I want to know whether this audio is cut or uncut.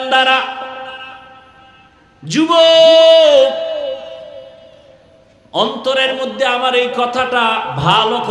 uncut